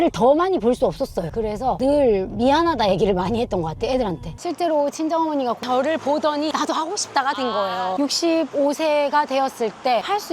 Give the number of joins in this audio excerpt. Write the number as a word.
four